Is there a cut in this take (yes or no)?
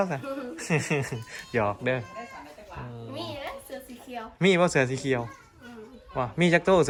no